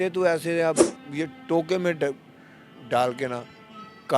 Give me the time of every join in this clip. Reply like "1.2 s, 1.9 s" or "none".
1.0 s